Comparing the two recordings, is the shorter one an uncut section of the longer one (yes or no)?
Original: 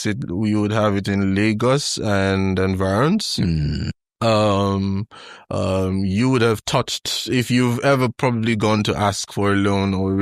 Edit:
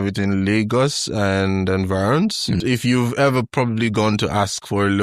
no